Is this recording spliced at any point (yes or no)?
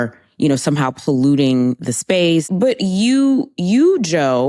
yes